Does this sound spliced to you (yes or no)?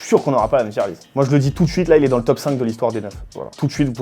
yes